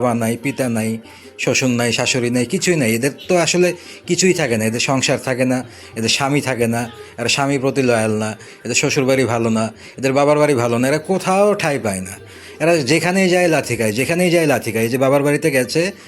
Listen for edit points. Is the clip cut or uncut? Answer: uncut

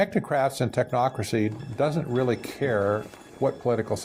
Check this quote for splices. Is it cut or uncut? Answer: uncut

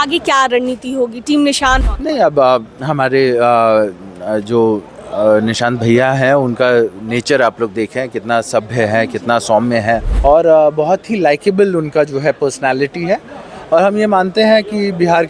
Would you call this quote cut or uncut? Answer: cut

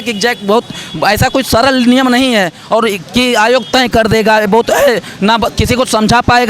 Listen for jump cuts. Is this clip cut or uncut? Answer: uncut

